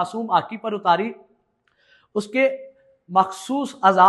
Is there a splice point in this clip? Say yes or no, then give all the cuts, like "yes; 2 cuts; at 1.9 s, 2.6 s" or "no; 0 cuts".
no; 0 cuts